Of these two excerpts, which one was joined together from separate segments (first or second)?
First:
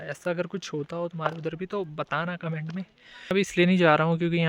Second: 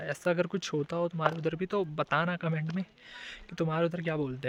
first